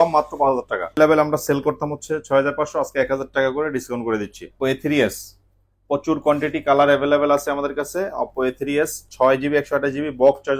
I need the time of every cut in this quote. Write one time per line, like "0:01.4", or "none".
0:01.0
0:04.4